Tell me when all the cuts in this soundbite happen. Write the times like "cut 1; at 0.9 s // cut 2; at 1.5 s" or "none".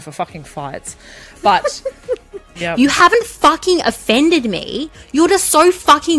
cut 1; at 2.5 s